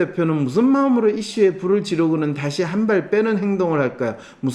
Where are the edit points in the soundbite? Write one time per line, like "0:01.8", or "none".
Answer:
none